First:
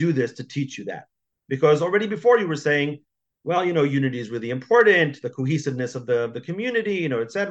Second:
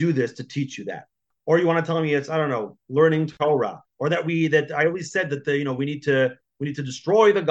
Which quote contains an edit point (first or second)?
second